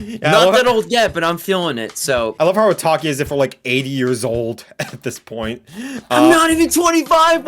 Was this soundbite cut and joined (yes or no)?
yes